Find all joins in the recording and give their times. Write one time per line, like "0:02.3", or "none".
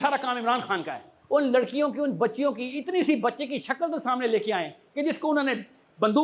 0:01.1